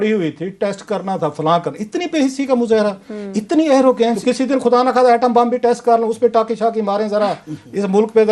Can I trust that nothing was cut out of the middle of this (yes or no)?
no